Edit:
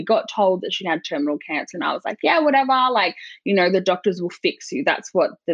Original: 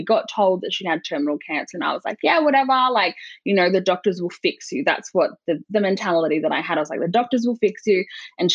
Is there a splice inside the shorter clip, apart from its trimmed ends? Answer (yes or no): no